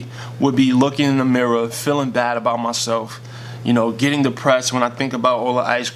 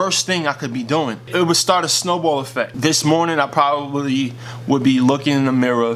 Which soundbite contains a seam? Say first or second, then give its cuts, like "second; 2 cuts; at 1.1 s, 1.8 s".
second; 2 cuts; at 1.3 s, 2.7 s